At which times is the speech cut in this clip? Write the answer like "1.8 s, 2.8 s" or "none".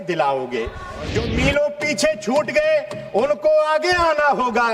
0.9 s